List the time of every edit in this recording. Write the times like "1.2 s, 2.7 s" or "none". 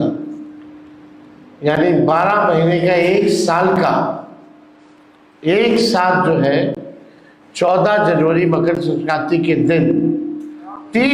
none